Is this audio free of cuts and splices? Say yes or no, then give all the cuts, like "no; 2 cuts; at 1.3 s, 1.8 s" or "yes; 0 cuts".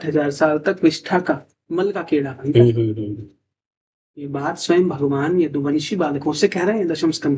yes; 0 cuts